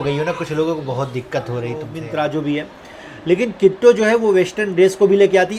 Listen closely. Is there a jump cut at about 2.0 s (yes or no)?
yes